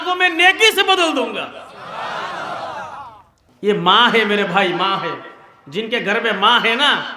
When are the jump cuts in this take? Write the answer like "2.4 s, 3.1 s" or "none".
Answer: 3.4 s